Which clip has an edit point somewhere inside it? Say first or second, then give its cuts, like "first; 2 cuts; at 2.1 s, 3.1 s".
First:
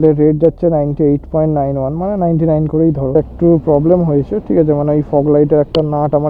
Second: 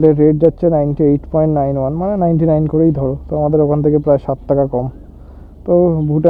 first; 1 cut; at 3.1 s